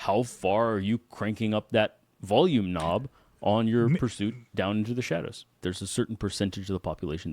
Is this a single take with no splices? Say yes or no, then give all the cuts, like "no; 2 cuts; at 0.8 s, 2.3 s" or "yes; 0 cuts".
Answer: no; 1 cut; at 5.6 s